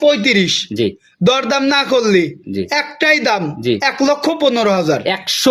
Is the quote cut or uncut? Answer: uncut